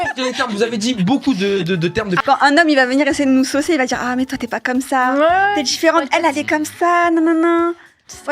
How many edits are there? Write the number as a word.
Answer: one